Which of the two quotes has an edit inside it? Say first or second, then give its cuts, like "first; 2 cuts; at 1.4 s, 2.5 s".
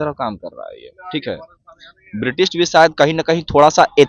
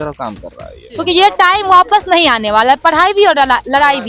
second; 1 cut; at 0.9 s